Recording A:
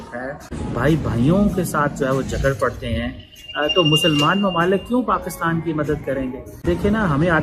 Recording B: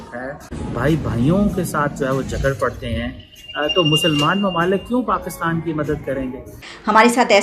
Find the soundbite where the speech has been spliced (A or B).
B